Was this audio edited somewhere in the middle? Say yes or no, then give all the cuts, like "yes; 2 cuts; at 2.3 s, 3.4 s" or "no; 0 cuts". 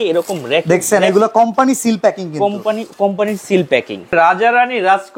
yes; 1 cut; at 4.1 s